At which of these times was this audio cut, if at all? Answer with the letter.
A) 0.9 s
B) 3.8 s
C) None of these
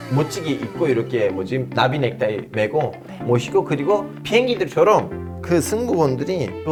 C